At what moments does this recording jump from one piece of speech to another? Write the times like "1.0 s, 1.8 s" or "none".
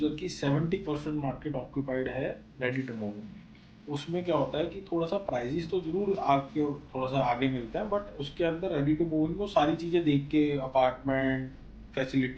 3.4 s